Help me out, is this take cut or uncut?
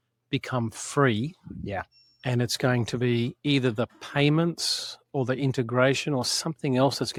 uncut